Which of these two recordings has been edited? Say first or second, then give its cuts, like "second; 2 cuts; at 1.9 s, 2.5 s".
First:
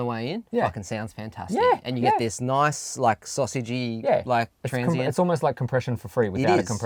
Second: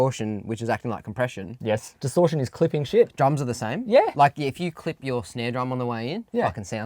second; 1 cut; at 1.9 s